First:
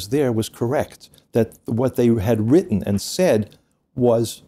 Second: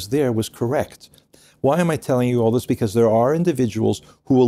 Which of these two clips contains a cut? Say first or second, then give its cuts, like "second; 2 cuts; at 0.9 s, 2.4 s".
second; 1 cut; at 1.2 s